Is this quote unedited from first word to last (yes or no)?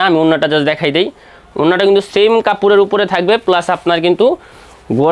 yes